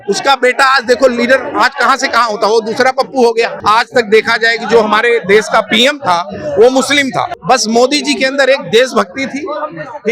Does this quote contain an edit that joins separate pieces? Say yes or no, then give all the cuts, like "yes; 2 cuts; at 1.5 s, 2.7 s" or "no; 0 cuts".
yes; 2 cuts; at 3.6 s, 7.3 s